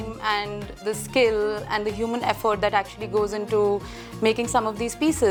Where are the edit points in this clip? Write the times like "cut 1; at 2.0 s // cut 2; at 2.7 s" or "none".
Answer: none